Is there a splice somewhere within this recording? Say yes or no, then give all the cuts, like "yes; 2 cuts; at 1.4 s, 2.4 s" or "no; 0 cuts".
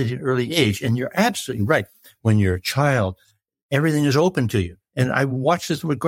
yes; 1 cut; at 2.1 s